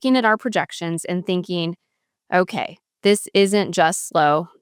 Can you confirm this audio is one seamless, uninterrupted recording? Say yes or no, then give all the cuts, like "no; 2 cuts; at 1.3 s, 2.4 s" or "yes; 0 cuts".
yes; 0 cuts